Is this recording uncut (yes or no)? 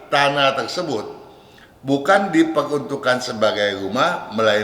yes